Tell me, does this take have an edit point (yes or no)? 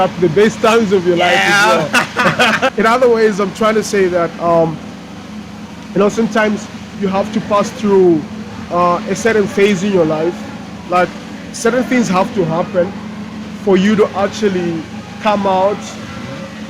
yes